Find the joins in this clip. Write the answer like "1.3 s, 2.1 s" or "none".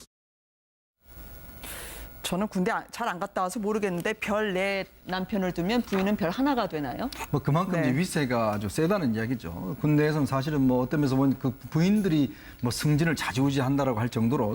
6.7 s